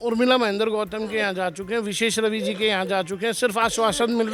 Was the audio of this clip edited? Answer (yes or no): no